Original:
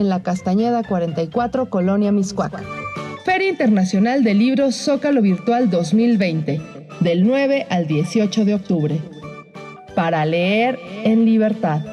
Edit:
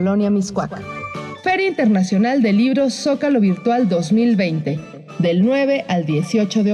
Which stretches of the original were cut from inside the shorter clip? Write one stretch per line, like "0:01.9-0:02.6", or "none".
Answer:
none